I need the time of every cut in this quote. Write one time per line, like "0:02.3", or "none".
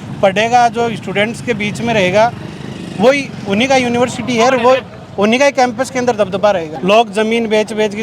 0:06.7